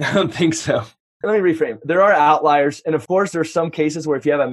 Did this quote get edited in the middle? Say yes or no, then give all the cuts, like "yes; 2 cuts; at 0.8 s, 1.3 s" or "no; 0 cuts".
yes; 2 cuts; at 1.2 s, 3.0 s